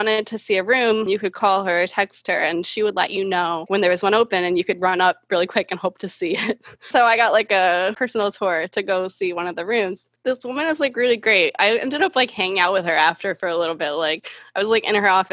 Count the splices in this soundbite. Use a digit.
4